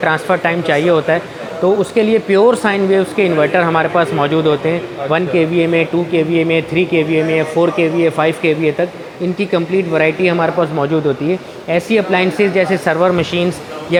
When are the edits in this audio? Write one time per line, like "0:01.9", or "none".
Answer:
none